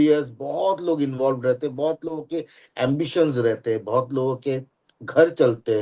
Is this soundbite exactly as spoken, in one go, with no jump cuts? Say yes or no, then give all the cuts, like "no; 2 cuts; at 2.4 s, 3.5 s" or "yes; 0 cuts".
yes; 0 cuts